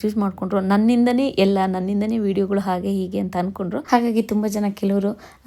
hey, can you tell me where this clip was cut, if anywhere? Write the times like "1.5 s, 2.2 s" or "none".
3.8 s